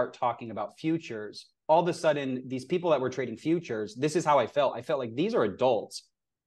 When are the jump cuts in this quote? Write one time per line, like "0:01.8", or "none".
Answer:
none